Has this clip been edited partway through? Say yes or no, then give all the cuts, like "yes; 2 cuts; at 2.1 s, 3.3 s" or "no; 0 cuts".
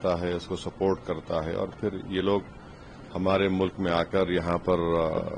no; 0 cuts